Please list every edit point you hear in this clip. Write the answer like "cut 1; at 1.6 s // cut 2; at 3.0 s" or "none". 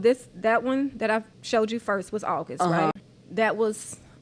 cut 1; at 1.4 s // cut 2; at 3.1 s